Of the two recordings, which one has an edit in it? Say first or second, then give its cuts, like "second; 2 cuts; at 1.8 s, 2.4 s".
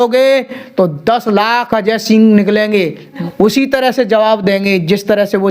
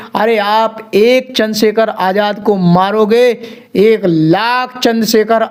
first; 1 cut; at 3.2 s